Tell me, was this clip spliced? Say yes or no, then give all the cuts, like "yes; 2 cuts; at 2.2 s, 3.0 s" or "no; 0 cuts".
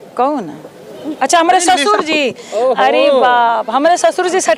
no; 0 cuts